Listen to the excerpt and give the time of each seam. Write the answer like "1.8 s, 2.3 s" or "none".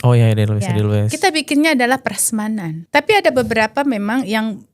2.7 s

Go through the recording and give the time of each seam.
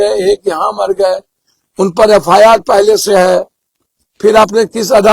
none

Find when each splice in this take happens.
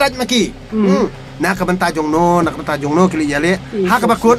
1.2 s

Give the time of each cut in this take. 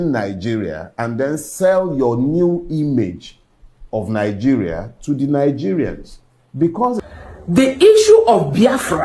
7.0 s

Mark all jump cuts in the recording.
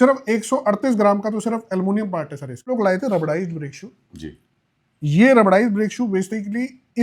2.7 s

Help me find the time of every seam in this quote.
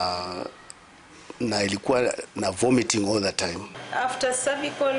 3.7 s

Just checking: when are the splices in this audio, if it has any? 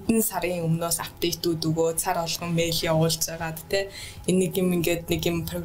none

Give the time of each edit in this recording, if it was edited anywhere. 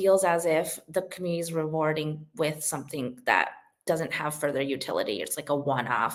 none

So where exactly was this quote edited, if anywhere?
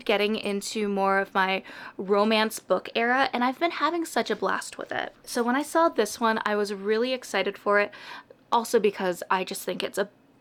none

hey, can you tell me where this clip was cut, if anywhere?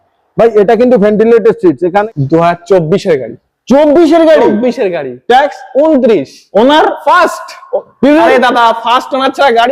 2.0 s

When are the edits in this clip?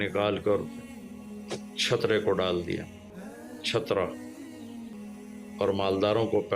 4.9 s

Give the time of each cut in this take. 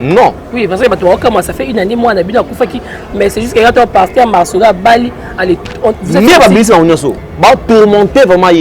7.2 s

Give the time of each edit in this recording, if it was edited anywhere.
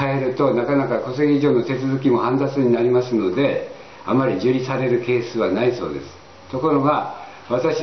6.5 s

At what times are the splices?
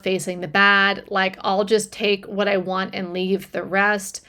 none

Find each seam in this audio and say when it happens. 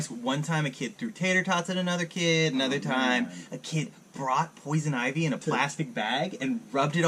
none

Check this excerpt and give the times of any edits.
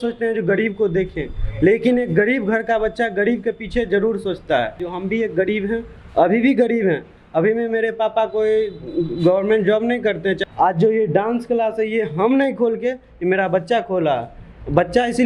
4.8 s, 10.4 s

